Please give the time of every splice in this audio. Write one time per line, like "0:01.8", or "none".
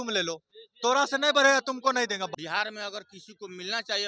0:02.3